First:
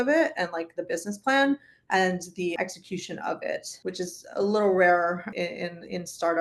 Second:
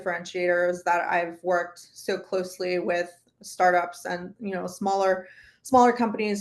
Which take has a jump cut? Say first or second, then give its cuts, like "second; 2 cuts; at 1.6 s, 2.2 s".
first; 3 cuts; at 2.5 s, 3.7 s, 5.3 s